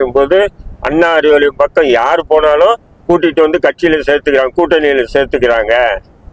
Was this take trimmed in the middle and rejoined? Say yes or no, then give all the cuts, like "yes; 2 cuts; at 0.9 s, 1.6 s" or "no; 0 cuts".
no; 0 cuts